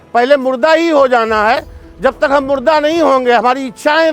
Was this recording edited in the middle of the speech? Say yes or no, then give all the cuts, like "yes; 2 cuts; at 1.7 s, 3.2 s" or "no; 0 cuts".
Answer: no; 0 cuts